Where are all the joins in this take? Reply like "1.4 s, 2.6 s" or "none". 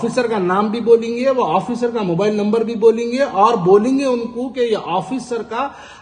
none